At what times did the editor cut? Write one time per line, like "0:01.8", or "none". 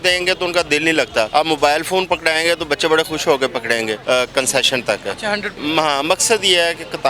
0:01.3
0:04.0
0:05.5